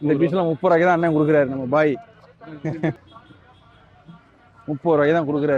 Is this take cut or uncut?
cut